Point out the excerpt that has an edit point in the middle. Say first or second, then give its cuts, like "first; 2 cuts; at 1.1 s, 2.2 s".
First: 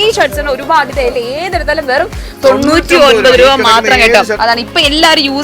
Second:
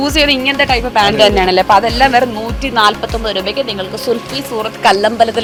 first; 1 cut; at 4.3 s